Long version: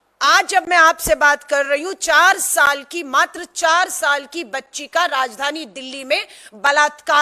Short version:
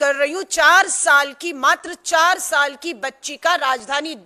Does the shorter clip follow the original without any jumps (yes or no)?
yes